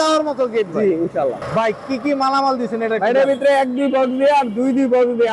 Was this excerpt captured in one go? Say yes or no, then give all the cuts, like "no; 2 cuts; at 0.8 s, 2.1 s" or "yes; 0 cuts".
no; 1 cut; at 0.9 s